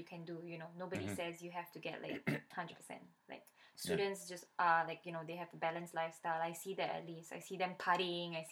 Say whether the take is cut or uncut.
uncut